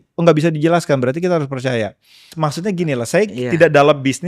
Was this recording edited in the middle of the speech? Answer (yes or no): yes